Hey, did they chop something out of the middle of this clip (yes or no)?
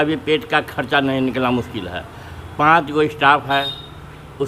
no